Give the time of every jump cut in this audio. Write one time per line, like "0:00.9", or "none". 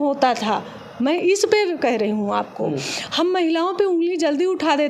none